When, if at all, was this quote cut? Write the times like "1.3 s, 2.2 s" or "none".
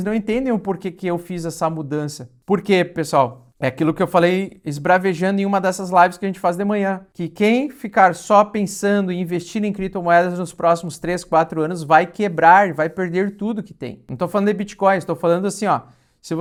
none